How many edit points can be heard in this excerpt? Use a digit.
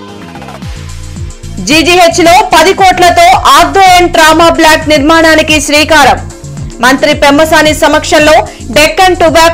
0